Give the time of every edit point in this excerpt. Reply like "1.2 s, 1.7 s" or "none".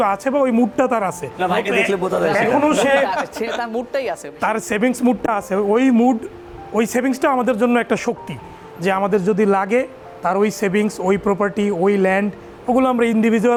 none